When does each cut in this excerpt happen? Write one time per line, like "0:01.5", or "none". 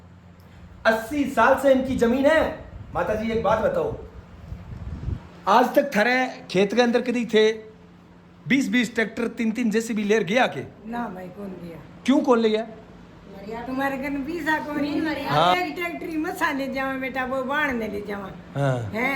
0:15.5